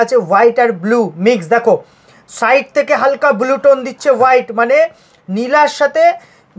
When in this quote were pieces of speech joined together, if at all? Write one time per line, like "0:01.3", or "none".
none